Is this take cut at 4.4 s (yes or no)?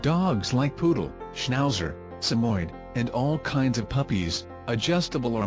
yes